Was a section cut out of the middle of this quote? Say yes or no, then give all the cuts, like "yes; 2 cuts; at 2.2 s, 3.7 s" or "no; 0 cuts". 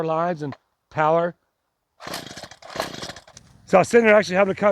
yes; 1 cut; at 3.3 s